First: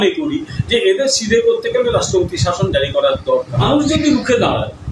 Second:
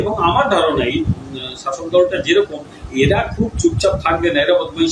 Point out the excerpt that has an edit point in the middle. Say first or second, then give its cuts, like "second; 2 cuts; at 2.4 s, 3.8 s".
first; 1 cut; at 3.6 s